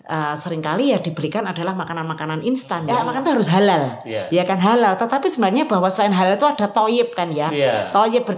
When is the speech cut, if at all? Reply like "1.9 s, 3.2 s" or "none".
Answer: 2.7 s